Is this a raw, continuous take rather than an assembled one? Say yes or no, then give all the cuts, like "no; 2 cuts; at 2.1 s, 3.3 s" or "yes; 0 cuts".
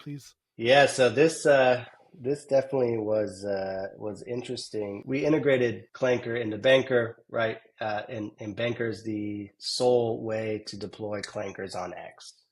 no; 2 cuts; at 5.0 s, 5.9 s